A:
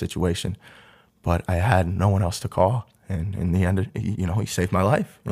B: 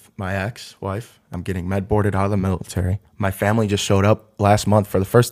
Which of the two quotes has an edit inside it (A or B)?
B